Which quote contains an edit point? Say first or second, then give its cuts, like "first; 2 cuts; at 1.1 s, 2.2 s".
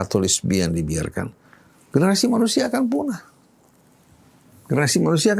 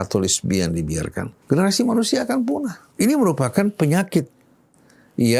second; 2 cuts; at 1.3 s, 2.8 s